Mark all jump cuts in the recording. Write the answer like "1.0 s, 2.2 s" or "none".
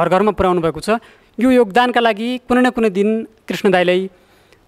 none